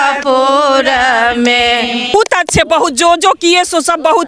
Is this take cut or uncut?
cut